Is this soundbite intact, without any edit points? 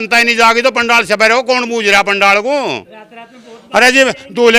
yes; 0 cuts

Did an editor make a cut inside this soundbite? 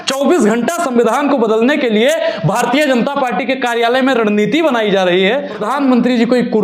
yes; 1 cut; at 5.6 s

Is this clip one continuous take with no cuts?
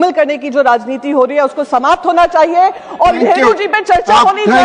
no; 1 cut; at 3.2 s

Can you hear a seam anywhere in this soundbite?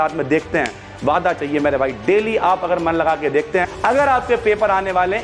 yes; 1 cut; at 3.7 s

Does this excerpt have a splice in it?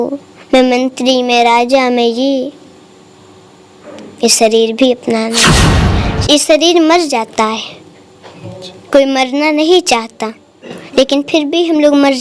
yes; 1 cut; at 5.6 s

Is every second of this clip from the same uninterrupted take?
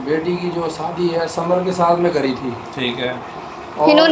yes; 0 cuts

